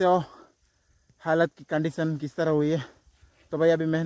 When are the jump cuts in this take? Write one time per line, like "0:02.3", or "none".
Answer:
none

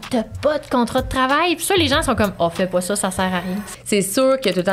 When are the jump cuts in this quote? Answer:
0:03.6

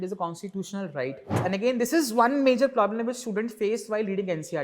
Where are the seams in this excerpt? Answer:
0:01.4

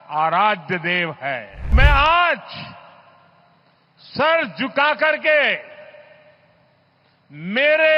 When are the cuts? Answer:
0:01.7

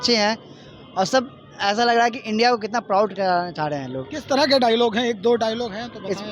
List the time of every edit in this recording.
none

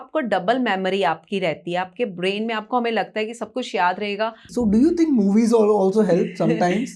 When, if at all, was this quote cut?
0:04.5

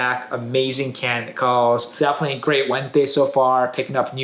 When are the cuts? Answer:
0:01.9

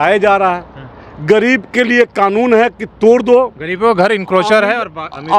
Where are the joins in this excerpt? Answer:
none

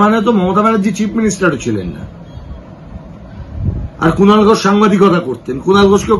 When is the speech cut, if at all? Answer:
none

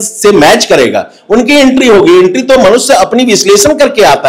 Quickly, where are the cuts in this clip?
none

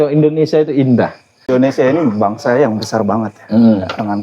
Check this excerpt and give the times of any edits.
0:01.4

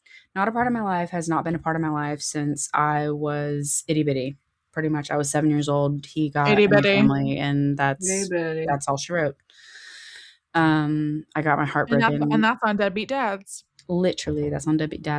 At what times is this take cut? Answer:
none

